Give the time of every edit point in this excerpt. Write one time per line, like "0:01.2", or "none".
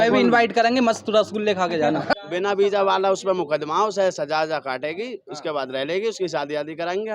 0:02.1